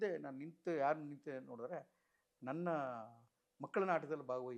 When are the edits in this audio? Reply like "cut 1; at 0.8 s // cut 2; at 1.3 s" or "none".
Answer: none